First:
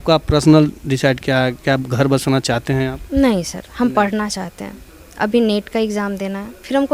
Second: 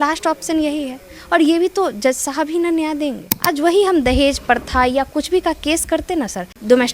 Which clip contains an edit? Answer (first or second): second